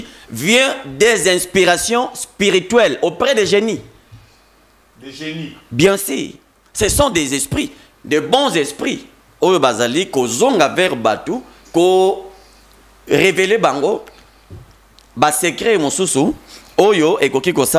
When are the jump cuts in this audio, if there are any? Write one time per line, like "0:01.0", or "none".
none